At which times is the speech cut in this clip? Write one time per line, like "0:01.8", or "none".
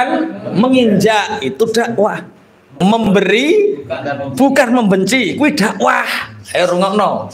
0:02.7